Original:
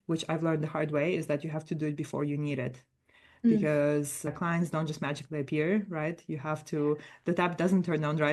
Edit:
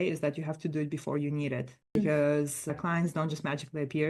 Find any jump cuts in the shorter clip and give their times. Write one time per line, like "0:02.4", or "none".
0:02.0